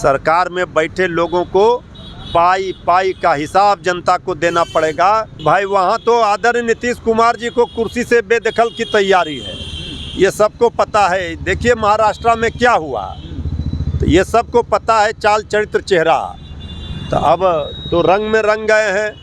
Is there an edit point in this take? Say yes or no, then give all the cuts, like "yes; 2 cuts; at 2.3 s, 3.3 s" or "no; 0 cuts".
yes; 1 cut; at 5.4 s